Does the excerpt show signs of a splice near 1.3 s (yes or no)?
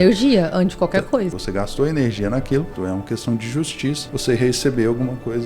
yes